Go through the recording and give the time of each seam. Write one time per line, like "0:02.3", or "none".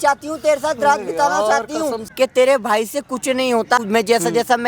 0:02.0
0:03.8